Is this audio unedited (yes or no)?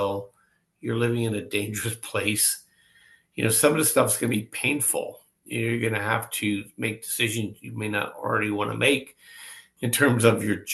yes